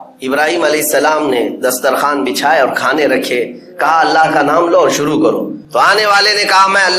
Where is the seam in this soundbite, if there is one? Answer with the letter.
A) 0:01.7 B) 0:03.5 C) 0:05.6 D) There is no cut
C